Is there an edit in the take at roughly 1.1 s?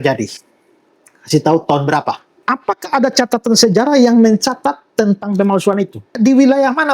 no; 2 cuts; at 2.3 s, 6.1 s

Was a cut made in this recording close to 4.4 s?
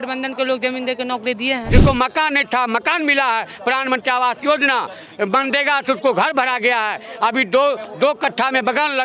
no; 1 cut; at 1.6 s

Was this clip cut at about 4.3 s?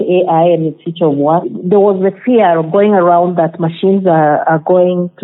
no; 1 cut; at 1.5 s

